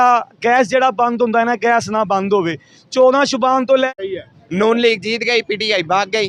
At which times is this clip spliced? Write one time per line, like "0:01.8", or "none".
0:03.9